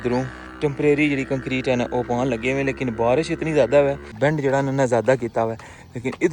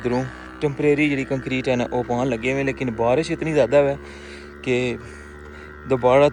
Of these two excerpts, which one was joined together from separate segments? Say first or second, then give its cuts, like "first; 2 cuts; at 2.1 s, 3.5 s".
first; 1 cut; at 4.1 s